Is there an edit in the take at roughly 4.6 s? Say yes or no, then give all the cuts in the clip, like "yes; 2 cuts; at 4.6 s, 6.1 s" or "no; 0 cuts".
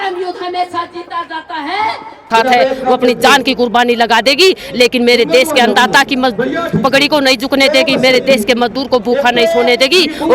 no; 1 cut; at 2.3 s